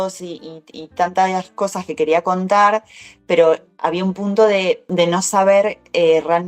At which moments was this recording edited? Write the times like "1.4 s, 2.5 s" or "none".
4.8 s